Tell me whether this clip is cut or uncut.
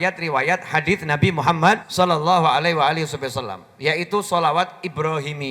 cut